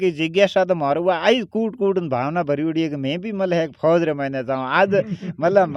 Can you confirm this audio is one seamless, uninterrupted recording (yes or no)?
yes